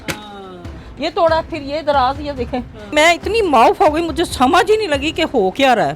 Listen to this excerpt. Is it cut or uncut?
cut